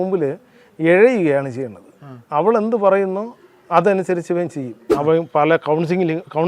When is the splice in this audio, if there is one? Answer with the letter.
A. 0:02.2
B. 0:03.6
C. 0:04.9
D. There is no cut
C